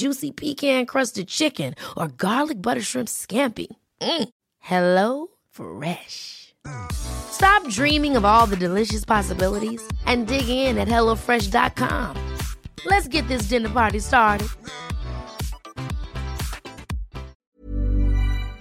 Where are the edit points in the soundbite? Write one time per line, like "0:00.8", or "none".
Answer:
0:17.3